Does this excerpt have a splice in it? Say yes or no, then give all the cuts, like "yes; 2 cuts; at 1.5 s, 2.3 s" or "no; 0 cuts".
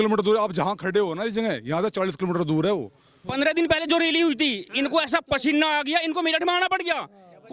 yes; 1 cut; at 3.4 s